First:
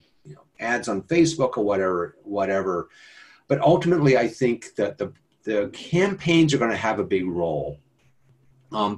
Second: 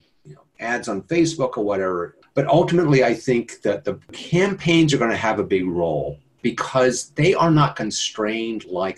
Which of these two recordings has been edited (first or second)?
second